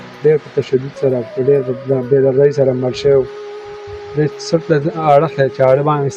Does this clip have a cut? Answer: no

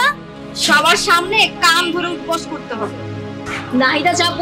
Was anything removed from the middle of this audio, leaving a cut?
yes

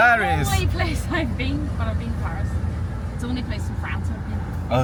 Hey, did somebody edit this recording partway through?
no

